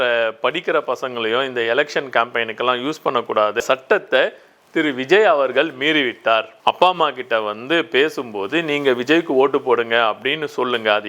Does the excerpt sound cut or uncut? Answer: cut